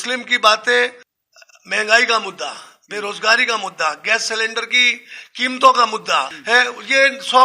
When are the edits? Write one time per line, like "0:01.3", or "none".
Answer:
0:01.1
0:06.3